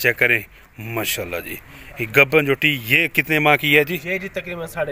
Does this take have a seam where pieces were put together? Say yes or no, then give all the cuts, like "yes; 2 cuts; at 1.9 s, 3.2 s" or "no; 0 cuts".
no; 0 cuts